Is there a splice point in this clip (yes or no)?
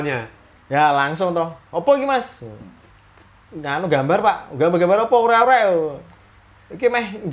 no